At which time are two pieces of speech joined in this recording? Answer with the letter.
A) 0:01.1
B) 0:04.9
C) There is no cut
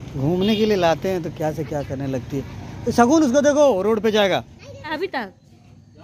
B